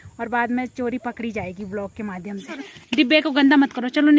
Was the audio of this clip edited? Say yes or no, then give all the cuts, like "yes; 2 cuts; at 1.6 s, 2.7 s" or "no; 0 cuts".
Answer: yes; 1 cut; at 2.7 s